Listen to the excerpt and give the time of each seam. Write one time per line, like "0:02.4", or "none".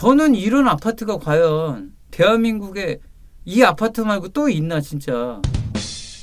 none

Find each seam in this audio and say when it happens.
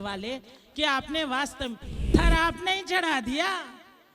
0:02.1

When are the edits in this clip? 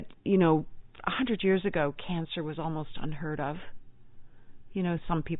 none

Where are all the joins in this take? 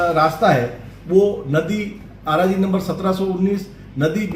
none

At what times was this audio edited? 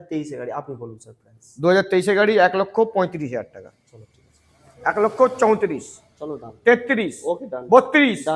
none

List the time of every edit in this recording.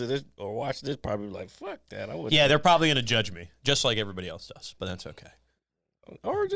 none

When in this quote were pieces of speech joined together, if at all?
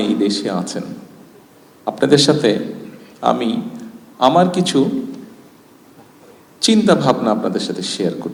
none

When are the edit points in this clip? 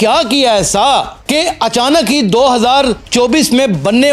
none

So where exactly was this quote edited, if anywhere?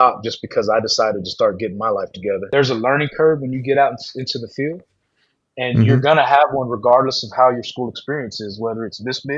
0:02.4

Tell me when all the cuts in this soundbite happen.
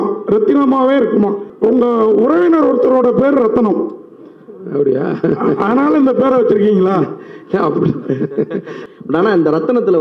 0:01.4
0:08.8

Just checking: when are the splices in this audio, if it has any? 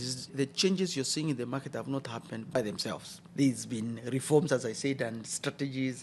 none

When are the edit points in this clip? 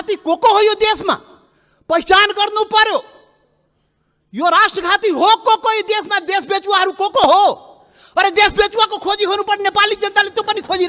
none

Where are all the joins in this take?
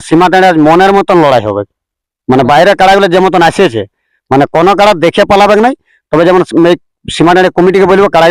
none

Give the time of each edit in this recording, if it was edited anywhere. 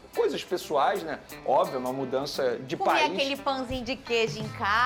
none

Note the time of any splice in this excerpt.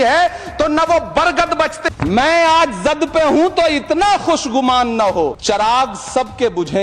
0:01.8
0:05.4

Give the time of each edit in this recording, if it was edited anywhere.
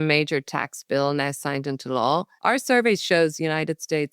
0:02.3

